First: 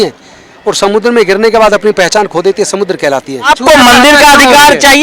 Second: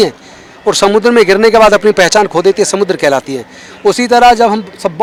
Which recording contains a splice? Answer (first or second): first